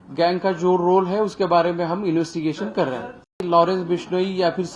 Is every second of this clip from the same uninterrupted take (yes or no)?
no